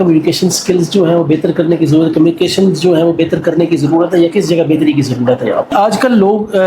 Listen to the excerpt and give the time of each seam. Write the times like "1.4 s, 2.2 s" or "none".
5.7 s